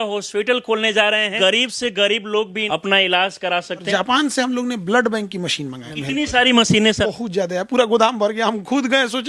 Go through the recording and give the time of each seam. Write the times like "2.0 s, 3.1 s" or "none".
1.3 s, 2.6 s, 3.9 s, 5.9 s, 7.0 s